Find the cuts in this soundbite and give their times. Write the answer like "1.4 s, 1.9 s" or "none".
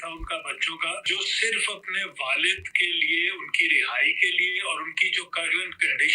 1.0 s